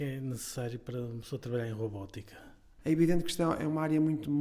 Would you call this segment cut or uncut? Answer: cut